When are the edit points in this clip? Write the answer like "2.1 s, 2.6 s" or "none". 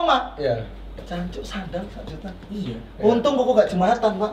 0.9 s